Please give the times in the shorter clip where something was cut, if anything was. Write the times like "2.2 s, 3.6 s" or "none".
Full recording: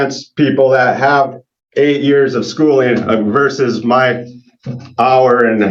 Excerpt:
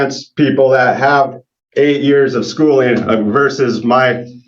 none